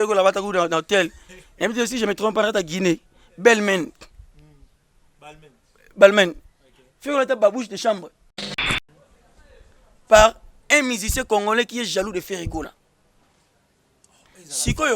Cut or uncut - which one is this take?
cut